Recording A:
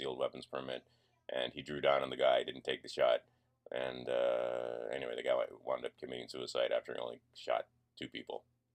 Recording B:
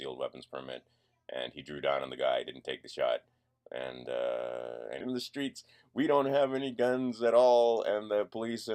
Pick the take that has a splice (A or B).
A